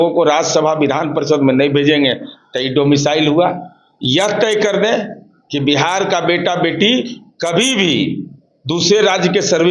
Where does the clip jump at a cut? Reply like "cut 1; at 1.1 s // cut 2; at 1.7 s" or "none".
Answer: none